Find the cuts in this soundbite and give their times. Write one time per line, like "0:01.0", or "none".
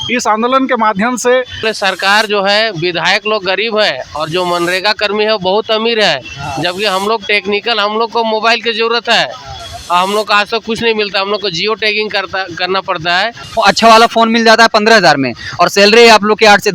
0:01.7
0:13.4